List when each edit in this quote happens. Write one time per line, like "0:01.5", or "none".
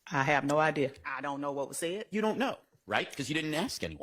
0:01.1